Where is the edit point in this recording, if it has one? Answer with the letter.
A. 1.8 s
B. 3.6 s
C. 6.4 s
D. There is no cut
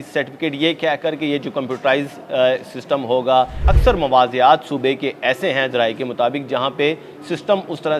B